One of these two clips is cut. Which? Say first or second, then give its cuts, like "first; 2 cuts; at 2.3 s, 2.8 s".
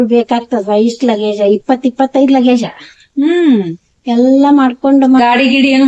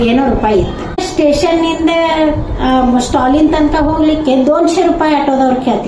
second; 1 cut; at 1.0 s